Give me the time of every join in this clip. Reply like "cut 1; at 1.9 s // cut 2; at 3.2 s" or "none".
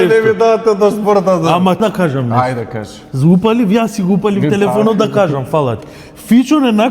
cut 1; at 1.8 s